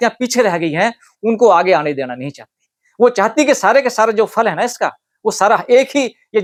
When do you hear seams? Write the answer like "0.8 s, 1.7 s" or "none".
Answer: none